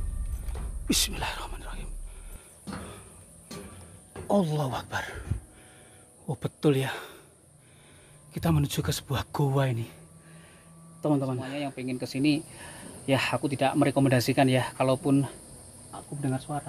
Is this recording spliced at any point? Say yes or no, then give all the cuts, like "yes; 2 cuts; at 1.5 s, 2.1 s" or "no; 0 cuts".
yes; 1 cut; at 11.7 s